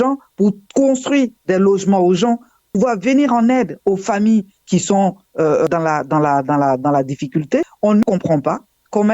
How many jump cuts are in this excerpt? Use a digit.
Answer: 1